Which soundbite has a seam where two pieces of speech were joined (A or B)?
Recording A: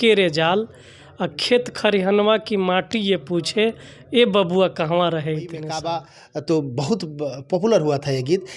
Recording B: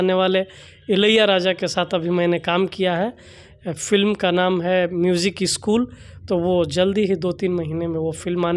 A